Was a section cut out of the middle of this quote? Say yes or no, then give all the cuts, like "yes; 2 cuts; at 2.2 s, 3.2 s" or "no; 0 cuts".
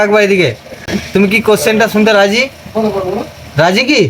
no; 0 cuts